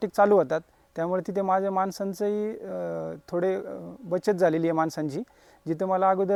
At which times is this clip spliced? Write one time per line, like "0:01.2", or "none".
none